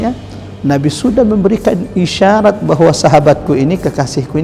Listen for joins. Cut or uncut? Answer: uncut